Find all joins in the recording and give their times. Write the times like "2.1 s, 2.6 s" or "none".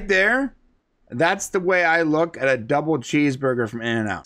none